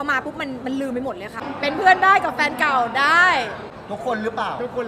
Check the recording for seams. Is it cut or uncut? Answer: cut